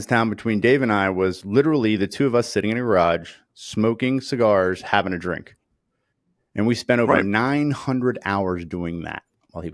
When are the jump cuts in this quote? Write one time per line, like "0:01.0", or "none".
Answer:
none